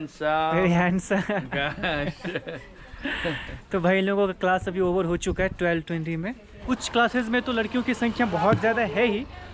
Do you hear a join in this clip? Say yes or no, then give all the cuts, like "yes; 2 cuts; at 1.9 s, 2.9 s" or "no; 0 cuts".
no; 0 cuts